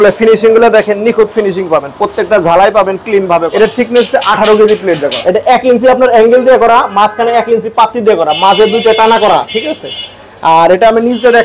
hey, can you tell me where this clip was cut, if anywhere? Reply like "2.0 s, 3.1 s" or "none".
3.5 s, 5.1 s